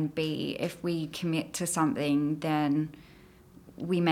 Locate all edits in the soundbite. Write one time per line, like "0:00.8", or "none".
none